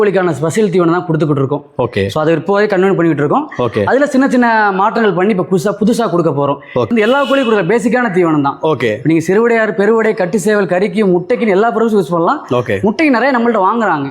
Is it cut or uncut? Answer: cut